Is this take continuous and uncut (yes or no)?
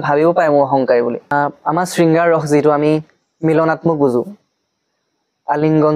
no